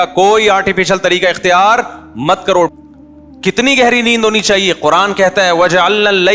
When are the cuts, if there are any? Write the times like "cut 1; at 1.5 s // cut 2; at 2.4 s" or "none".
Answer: cut 1; at 2.7 s